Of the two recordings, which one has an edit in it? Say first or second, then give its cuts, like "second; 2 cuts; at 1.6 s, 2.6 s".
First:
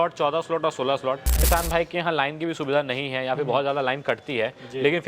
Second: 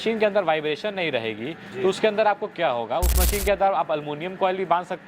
first; 1 cut; at 1.5 s